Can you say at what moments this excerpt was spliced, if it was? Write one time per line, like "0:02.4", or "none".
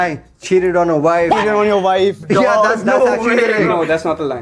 0:01.5